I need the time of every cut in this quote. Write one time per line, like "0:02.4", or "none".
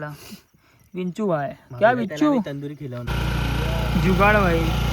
0:03.2